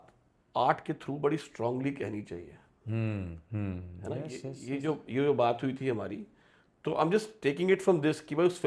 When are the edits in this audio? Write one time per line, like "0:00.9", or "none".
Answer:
none

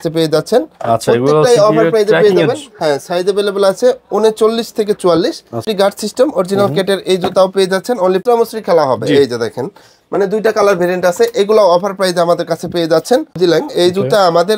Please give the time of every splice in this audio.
0:05.7
0:08.2
0:13.4

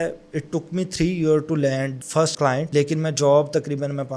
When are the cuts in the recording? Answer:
none

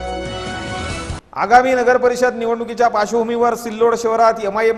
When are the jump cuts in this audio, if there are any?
0:01.1

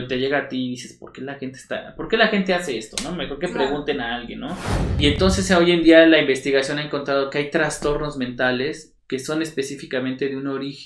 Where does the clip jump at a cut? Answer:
0:05.0

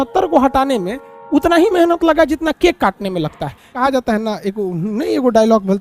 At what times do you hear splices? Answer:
0:03.8

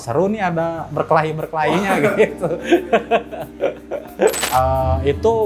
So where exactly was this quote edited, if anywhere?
0:04.4

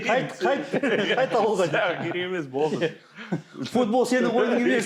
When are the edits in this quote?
none

